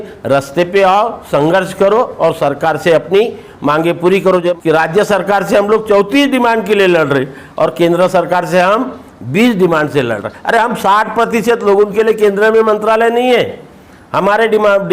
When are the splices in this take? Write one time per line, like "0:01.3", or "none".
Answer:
0:04.5